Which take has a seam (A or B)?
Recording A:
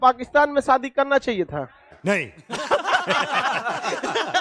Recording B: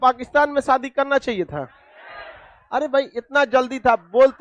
B